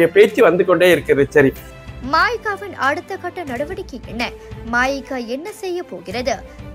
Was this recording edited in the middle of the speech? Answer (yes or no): no